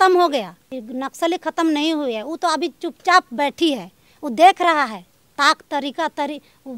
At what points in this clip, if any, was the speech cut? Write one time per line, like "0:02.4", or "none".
none

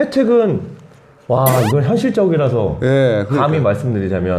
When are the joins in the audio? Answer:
none

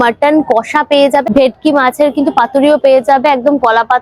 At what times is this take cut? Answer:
0:01.4

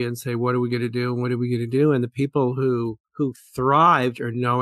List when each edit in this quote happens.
0:03.0

